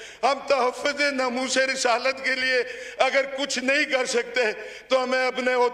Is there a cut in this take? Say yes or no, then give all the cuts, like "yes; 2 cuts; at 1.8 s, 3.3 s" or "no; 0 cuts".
no; 0 cuts